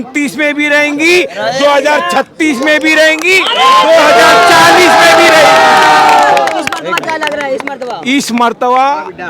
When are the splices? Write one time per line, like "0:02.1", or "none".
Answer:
none